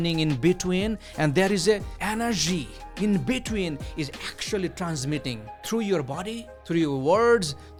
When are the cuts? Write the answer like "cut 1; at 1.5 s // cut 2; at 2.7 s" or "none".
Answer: none